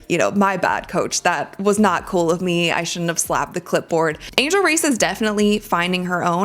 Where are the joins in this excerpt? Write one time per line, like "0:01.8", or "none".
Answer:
0:04.3